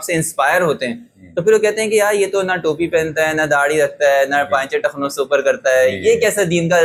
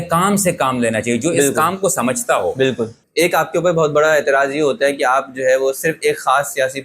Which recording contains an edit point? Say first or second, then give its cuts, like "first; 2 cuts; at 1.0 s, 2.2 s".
second; 1 cut; at 3.0 s